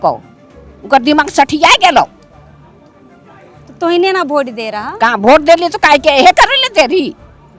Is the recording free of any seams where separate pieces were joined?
yes; 0 cuts

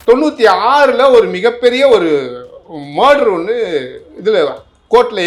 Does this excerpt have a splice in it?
no; 0 cuts

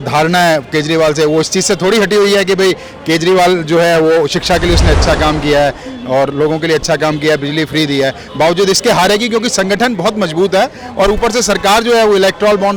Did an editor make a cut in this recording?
no; 0 cuts

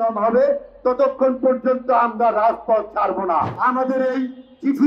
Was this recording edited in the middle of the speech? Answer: yes; 1 cut; at 3.5 s

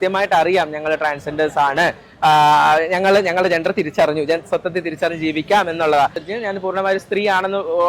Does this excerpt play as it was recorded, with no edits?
no; 1 cut; at 6.2 s

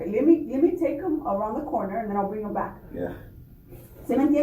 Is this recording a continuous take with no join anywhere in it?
yes; 0 cuts

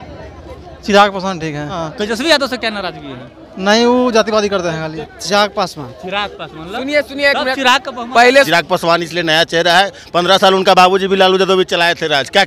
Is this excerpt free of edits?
no; 3 cuts; at 1.9 s, 5.0 s, 8.5 s

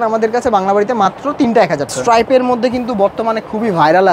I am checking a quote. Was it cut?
yes; 1 cut; at 1.9 s

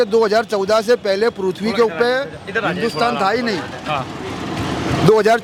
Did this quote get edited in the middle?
no; 0 cuts

